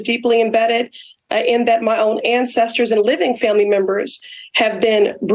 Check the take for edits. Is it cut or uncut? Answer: uncut